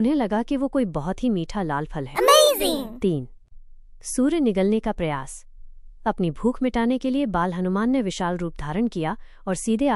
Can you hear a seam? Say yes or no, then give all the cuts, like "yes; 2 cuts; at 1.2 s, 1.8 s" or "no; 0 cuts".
yes; 2 cuts; at 2.1 s, 2.8 s